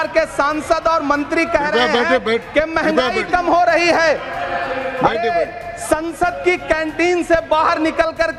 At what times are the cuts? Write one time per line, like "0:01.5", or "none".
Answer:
none